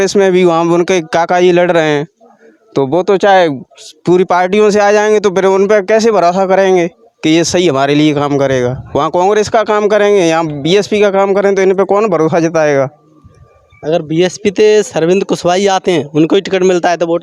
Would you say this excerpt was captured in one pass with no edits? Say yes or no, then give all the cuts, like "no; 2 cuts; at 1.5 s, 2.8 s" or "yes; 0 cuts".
yes; 0 cuts